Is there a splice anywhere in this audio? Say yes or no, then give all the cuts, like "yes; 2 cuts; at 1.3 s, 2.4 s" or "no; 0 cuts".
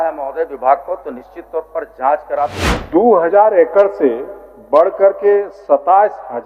yes; 1 cut; at 2.7 s